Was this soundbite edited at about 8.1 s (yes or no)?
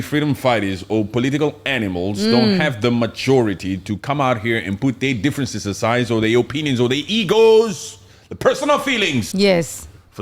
no